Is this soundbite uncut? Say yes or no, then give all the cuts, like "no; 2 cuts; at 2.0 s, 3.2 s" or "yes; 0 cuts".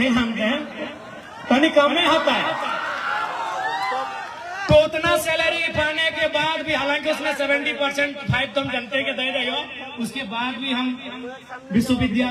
yes; 0 cuts